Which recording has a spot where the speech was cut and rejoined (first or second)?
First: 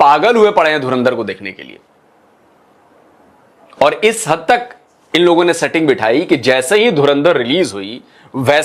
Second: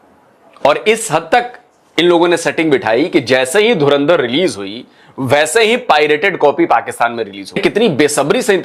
second